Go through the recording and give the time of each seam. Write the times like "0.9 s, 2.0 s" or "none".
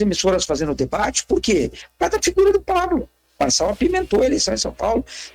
3.4 s